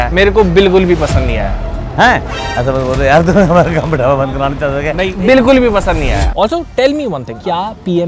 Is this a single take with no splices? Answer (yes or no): no